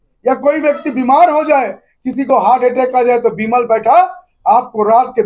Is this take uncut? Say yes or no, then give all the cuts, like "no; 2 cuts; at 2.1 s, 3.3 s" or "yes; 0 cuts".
yes; 0 cuts